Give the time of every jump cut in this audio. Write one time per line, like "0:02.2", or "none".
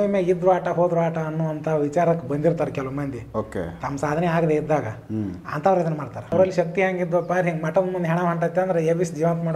0:06.3